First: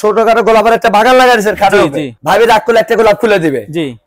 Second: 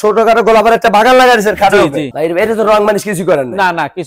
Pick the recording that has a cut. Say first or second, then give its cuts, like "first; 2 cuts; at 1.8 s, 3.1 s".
second; 1 cut; at 2.1 s